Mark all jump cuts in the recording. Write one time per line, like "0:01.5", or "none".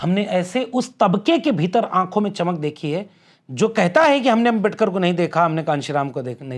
none